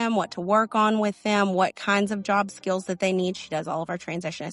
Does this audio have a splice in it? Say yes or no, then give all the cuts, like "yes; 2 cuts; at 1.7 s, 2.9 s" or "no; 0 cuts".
no; 0 cuts